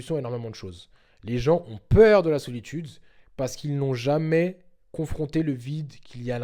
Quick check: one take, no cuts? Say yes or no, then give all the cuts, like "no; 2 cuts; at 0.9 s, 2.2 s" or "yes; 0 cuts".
yes; 0 cuts